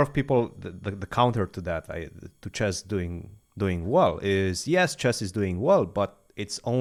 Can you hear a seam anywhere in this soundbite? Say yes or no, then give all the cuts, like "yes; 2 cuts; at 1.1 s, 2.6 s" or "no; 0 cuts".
no; 0 cuts